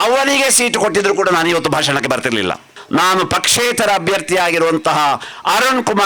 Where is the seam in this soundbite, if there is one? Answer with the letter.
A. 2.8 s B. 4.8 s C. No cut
A